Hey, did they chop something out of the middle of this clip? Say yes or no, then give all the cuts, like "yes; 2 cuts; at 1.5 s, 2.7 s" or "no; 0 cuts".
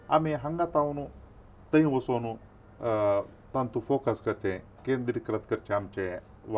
no; 0 cuts